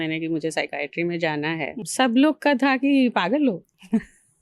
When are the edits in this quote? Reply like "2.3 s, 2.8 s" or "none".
1.8 s